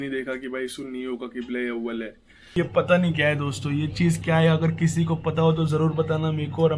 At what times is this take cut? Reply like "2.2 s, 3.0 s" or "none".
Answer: 2.6 s